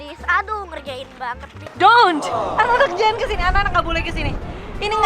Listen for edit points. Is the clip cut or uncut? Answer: cut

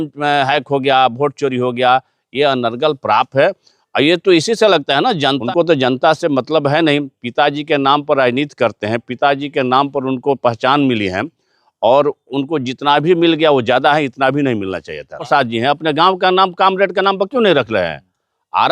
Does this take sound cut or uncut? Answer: cut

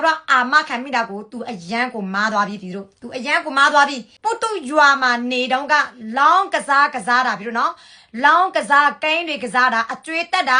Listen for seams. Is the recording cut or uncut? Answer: cut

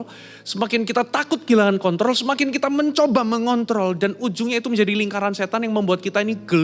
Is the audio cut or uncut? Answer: uncut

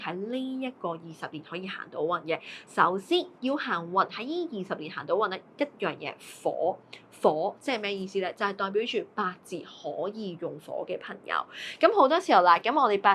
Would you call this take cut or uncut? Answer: uncut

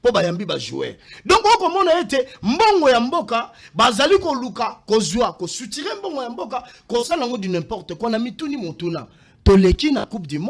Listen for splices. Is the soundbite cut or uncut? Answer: uncut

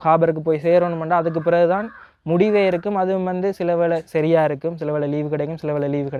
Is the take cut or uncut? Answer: uncut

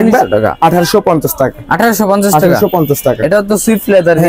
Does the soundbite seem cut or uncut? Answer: uncut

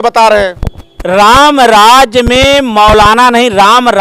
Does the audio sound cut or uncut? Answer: uncut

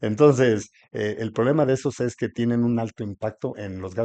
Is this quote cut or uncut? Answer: uncut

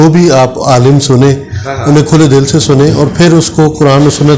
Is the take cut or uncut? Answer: uncut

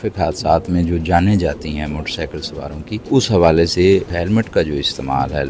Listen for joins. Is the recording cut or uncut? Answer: cut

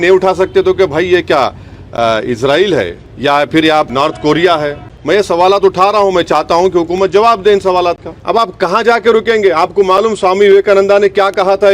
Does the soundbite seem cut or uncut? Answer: cut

